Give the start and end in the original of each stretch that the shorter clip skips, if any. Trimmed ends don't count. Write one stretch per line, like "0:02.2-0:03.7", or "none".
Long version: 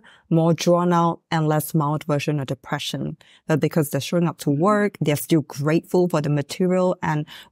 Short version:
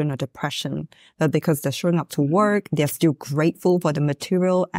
none